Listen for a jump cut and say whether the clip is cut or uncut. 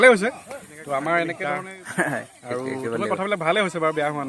cut